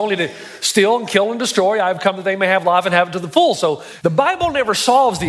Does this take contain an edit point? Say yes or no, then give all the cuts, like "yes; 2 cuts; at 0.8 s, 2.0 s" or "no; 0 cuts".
yes; 1 cut; at 3.9 s